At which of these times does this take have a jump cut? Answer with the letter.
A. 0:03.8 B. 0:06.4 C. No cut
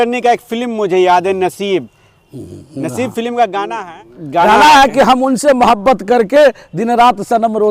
A